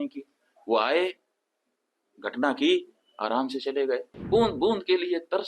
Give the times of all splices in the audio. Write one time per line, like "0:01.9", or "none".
0:04.1